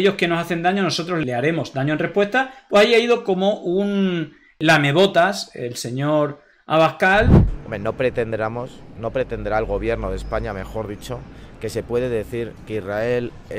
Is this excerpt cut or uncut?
cut